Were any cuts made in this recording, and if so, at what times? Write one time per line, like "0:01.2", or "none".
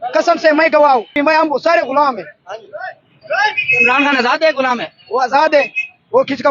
0:01.2